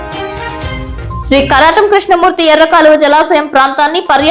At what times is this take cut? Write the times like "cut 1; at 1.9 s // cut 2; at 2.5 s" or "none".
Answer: cut 1; at 1.2 s